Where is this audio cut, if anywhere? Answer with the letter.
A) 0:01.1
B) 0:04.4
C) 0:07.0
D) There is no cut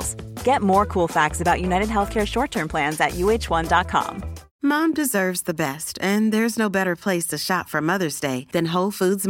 B